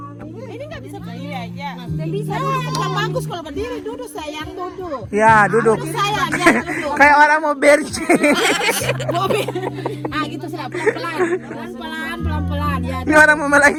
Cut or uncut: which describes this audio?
uncut